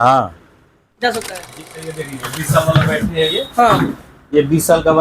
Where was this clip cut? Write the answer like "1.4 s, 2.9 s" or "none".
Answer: 1.5 s